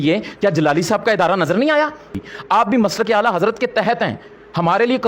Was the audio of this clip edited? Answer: yes; 1 cut; at 2.3 s

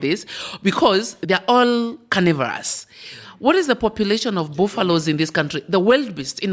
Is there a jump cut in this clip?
no; 0 cuts

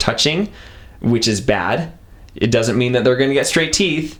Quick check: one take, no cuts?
yes; 0 cuts

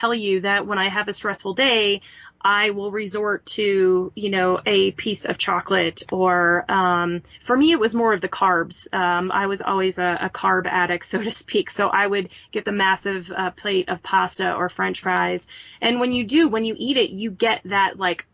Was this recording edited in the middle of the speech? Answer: no; 0 cuts

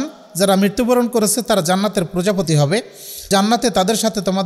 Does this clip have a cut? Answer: yes; 1 cut; at 3.2 s

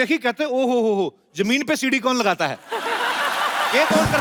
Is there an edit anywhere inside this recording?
no; 0 cuts

